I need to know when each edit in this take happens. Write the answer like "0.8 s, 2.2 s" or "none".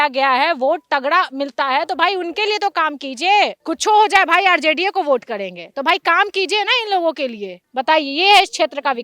none